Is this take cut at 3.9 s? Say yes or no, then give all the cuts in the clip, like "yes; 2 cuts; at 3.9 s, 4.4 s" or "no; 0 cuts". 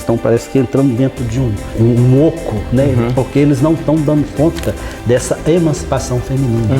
no; 1 cut; at 1.7 s